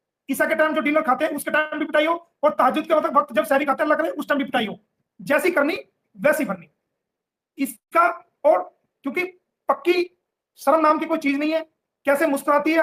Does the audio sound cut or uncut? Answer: uncut